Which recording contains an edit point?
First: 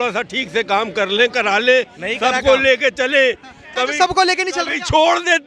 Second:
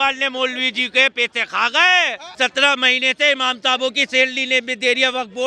second; 1 cut; at 2.2 s

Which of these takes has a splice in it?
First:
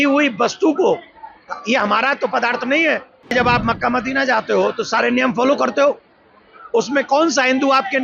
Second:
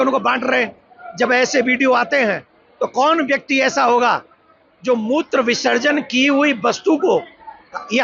first; 1 cut; at 3.3 s

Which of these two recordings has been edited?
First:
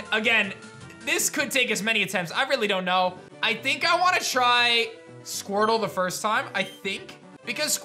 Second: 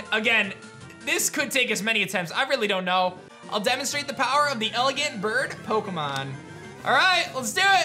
second; 1 cut; at 3.3 s

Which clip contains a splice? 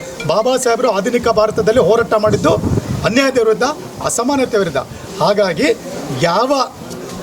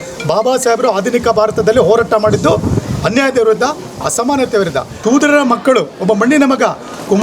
second; 1 cut; at 4.9 s

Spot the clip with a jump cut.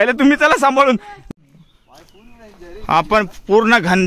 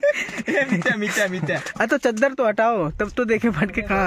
first; 1 cut; at 1.1 s

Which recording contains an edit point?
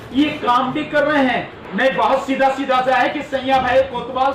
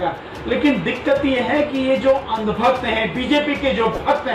first; 1 cut; at 1.6 s

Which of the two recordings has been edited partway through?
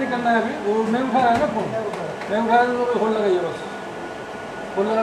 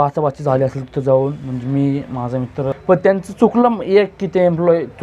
second; 1 cut; at 2.7 s

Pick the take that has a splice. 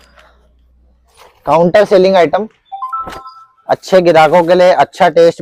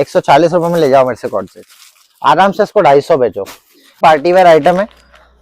second; 1 cut; at 4.0 s

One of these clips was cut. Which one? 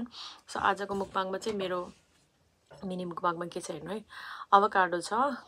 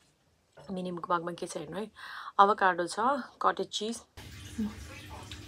second; 1 cut; at 4.3 s

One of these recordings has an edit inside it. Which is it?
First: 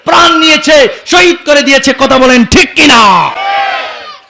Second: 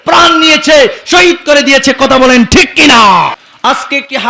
second; 1 cut; at 3.4 s

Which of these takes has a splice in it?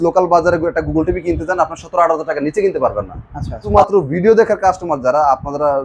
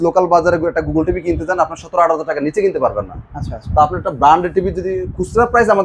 first; 1 cut; at 3.7 s

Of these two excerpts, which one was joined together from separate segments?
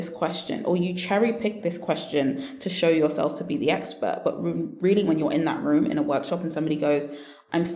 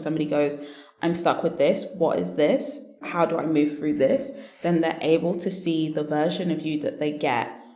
second; 1 cut; at 3.1 s

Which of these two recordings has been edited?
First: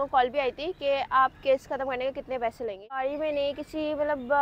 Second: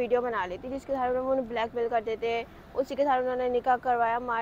first; 1 cut; at 3.1 s

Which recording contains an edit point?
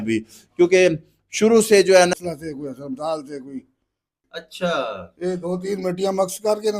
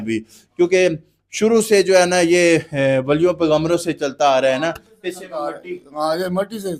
first; 2 cuts; at 2.1 s, 3.9 s

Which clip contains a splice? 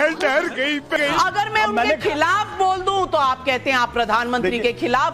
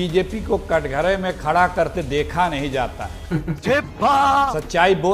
first; 1 cut; at 0.9 s

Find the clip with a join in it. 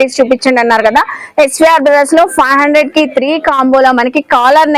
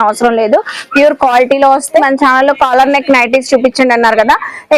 second; 1 cut; at 2.0 s

